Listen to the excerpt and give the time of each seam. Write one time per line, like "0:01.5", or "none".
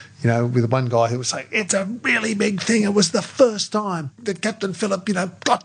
0:01.7
0:04.1